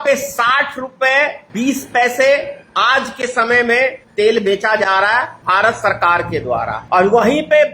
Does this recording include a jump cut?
yes; 4 cuts; at 1.4 s, 4.0 s, 5.3 s, 6.8 s

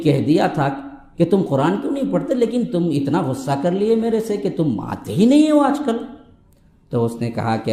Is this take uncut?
yes; 0 cuts

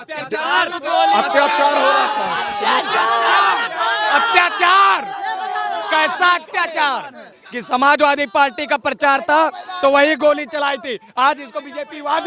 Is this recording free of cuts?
no; 1 cut; at 7.3 s

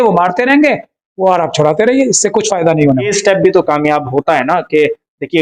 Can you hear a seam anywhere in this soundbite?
yes; 1 cut; at 3.1 s

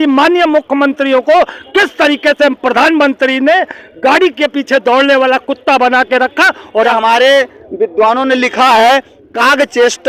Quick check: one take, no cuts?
no; 1 cut; at 6.9 s

